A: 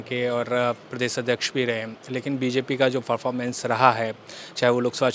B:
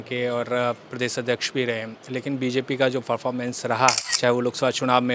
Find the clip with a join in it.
B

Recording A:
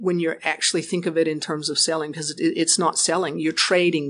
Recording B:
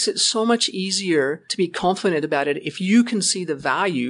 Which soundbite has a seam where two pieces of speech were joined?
B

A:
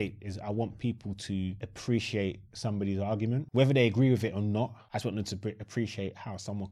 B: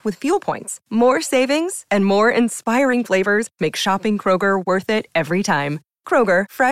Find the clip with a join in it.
A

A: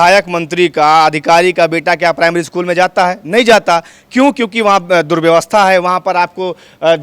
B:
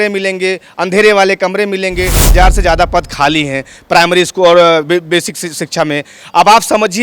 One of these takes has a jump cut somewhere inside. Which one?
B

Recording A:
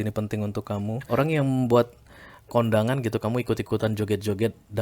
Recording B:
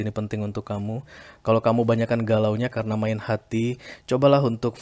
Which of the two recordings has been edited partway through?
A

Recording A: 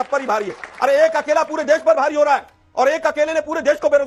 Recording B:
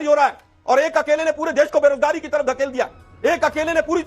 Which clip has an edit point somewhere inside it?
B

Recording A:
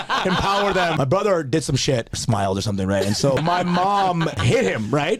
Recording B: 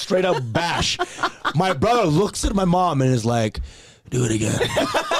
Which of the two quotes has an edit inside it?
A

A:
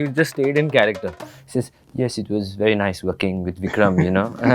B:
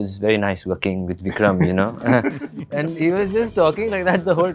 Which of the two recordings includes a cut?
A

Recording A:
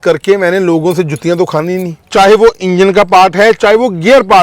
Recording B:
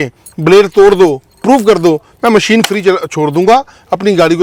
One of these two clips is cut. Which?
A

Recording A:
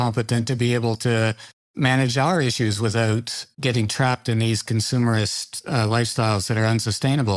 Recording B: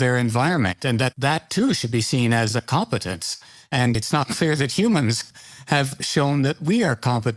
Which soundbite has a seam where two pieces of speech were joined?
B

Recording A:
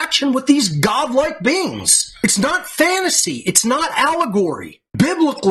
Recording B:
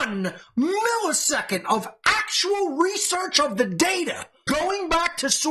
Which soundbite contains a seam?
B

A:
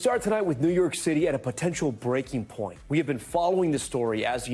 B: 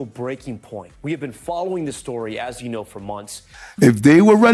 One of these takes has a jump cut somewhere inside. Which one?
B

